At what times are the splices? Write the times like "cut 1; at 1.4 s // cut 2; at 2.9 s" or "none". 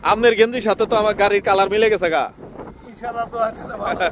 none